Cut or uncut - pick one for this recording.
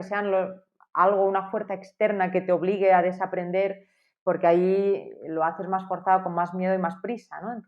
uncut